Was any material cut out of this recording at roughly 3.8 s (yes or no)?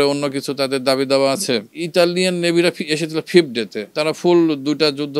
yes